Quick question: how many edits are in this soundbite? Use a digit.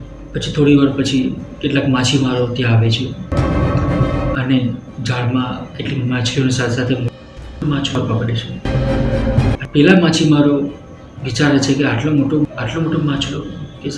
1